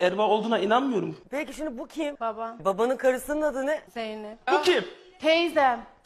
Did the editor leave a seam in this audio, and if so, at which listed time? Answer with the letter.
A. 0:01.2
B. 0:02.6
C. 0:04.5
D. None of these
B